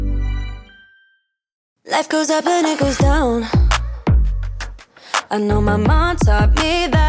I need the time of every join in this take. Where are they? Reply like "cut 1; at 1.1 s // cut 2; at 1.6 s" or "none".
cut 1; at 1.9 s